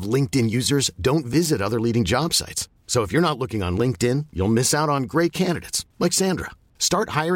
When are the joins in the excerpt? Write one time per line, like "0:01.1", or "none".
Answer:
none